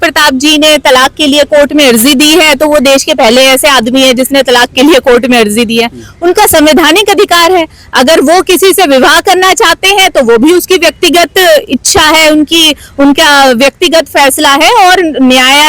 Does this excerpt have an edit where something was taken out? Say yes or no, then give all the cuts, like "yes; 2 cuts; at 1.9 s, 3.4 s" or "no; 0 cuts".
no; 0 cuts